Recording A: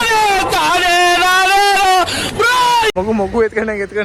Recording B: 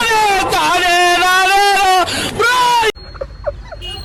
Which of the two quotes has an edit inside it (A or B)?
A